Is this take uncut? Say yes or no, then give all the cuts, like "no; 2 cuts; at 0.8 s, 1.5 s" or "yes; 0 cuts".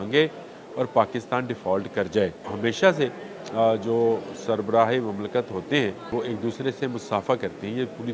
no; 2 cuts; at 2.4 s, 6.1 s